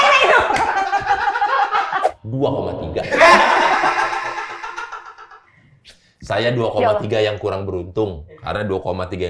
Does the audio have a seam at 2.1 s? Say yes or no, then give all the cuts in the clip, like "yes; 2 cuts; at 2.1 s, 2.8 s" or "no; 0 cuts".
yes; 1 cut; at 2.1 s